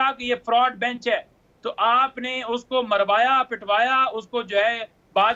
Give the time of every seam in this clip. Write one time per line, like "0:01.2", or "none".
none